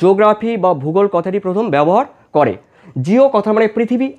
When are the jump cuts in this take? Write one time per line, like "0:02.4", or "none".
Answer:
0:02.8